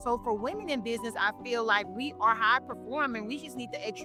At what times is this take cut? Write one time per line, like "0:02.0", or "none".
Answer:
none